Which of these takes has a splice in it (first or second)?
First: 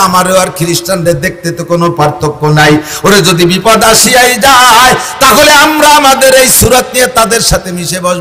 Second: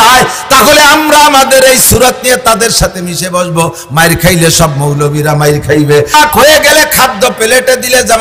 second